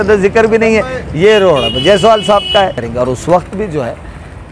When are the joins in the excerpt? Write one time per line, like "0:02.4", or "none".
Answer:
0:02.9